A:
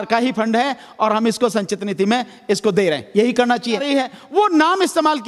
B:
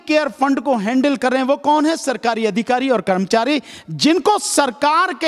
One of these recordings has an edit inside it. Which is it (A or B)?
A